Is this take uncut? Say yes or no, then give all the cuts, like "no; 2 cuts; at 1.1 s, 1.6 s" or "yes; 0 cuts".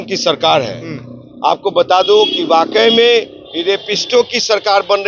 yes; 0 cuts